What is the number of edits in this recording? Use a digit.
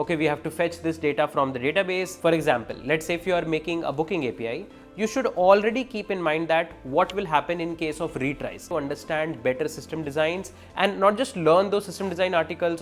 2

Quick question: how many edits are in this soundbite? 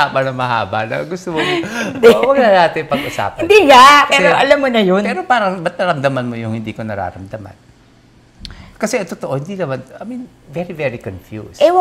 0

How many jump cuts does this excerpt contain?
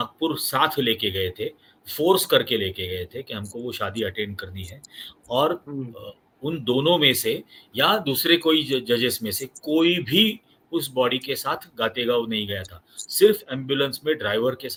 0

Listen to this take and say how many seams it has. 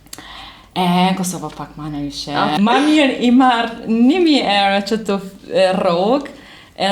1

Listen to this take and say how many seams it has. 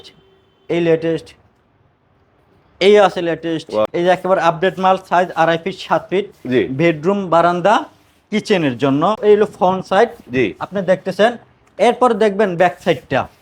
2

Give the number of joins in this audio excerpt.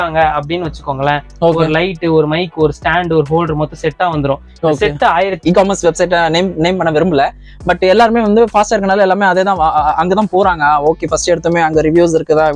1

